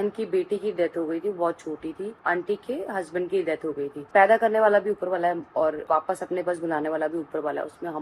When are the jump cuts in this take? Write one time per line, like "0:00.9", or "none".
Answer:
0:02.2
0:04.1